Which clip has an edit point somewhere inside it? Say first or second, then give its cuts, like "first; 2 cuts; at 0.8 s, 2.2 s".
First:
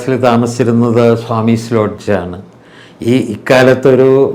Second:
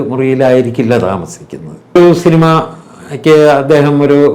second; 1 cut; at 2.0 s